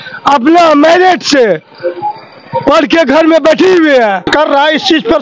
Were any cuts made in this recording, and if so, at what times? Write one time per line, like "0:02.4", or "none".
0:04.3